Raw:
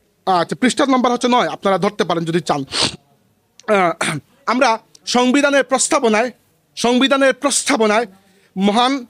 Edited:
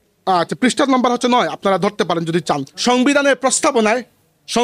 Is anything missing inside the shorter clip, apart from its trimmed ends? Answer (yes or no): yes